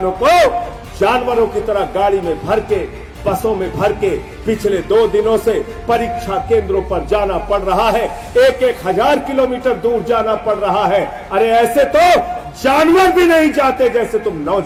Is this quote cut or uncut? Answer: uncut